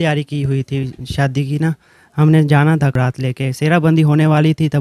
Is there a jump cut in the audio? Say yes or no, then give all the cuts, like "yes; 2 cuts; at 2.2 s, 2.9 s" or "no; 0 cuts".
yes; 1 cut; at 2.9 s